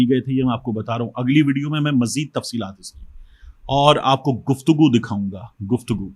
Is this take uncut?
yes; 0 cuts

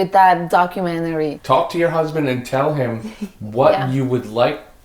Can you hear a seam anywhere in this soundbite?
yes; 1 cut; at 1.4 s

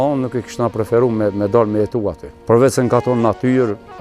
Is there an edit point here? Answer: yes; 1 cut; at 2.3 s

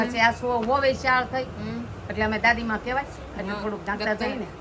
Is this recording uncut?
yes; 0 cuts

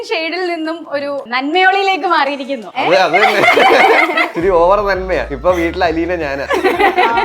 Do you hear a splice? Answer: yes; 5 cuts; at 1.3 s, 2.6 s, 4.3 s, 5.3 s, 6.4 s

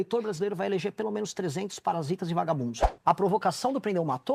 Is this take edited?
yes; 1 cut; at 2.8 s

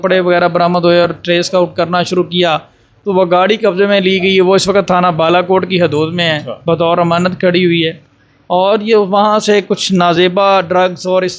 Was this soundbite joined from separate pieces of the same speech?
no; 0 cuts

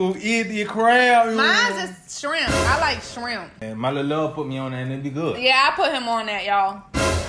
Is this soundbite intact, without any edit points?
no; 1 cut; at 3.6 s

